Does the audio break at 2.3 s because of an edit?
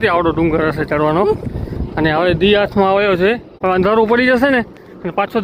no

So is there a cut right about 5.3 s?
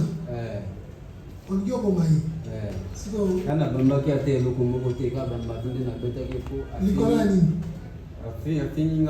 no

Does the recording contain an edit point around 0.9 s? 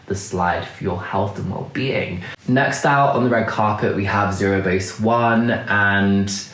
no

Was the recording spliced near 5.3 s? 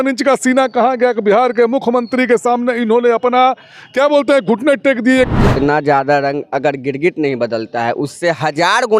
yes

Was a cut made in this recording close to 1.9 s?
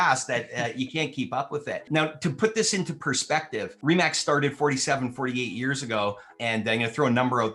yes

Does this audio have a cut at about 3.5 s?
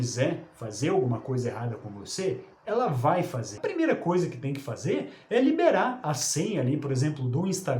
yes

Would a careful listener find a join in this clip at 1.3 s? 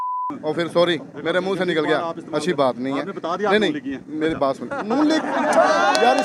no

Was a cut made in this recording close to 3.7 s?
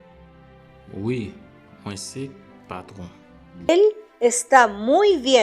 yes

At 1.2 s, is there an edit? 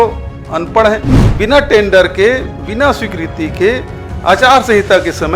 yes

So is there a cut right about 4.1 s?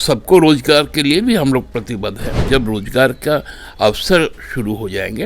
no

